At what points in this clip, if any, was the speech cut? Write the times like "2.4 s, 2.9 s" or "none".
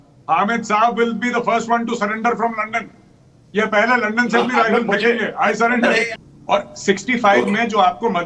6.1 s